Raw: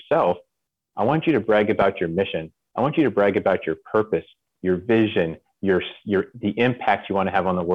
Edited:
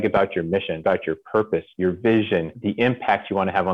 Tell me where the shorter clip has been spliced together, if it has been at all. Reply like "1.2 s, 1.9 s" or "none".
0.8 s, 1.7 s, 2.6 s